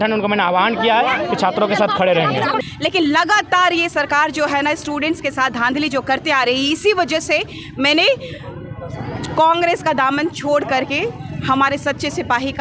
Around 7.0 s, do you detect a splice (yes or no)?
no